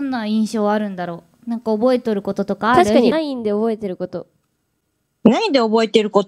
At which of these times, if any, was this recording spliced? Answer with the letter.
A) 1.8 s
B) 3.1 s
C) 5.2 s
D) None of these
B